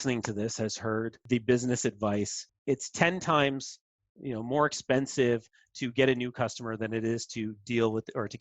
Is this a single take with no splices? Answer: no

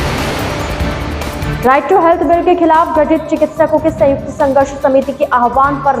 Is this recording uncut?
no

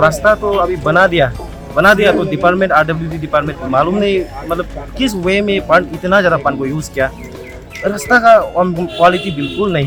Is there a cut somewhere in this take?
no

